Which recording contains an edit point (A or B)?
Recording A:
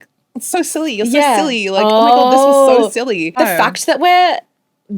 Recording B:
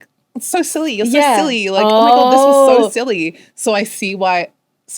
A